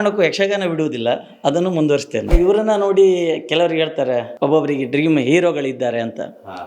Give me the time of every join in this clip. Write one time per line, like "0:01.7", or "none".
0:02.3
0:04.3